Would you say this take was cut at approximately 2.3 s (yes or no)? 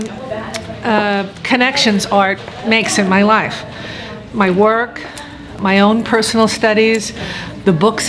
no